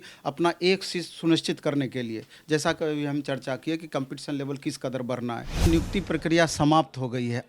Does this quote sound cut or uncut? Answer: cut